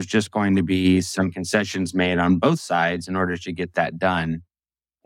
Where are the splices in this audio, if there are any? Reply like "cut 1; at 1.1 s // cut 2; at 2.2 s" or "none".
none